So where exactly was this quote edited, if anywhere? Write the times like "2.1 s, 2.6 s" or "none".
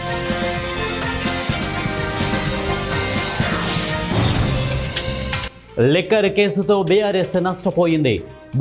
none